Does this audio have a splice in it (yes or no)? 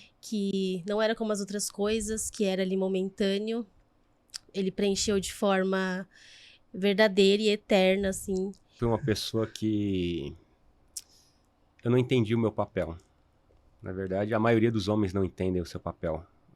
yes